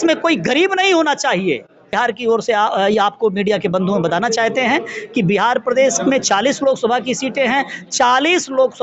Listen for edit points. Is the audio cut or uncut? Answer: cut